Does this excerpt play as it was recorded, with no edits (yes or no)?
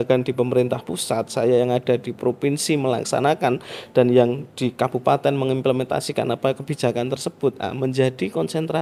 yes